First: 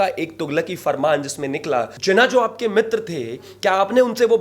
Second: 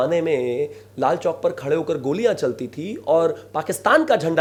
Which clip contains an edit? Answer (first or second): first